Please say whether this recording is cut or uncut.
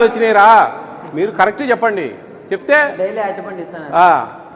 uncut